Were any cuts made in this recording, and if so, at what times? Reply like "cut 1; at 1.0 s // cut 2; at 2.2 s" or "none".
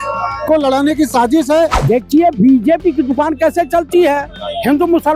cut 1; at 1.7 s